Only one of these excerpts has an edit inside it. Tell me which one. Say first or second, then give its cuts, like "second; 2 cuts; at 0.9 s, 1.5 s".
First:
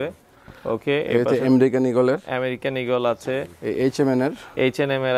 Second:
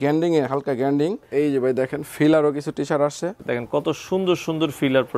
second; 2 cuts; at 1.2 s, 3.4 s